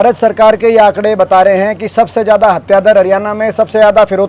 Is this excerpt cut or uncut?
uncut